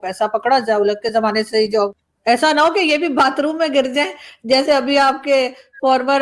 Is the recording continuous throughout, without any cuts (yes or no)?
no